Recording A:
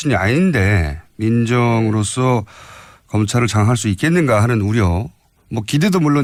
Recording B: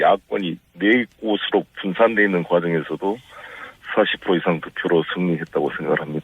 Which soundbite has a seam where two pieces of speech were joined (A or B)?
B